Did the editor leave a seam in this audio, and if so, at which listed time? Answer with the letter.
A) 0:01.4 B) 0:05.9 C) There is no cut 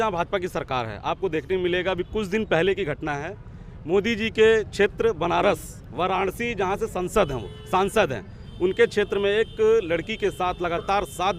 C